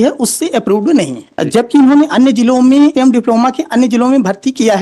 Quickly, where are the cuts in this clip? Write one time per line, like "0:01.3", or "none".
0:01.2
0:02.9

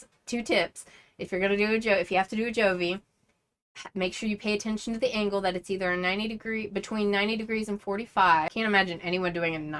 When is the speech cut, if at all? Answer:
0:08.5

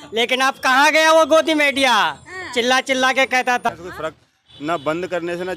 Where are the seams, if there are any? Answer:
0:03.7

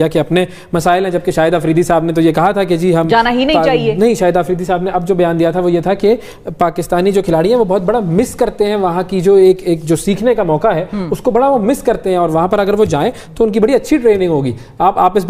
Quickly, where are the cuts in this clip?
none

